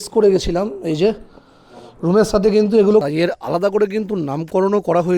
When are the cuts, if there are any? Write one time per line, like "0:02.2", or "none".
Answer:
0:03.0